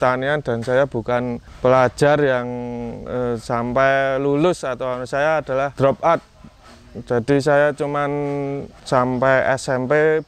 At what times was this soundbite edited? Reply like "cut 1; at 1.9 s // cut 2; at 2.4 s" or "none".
cut 1; at 1.5 s // cut 2; at 5.7 s // cut 3; at 8.7 s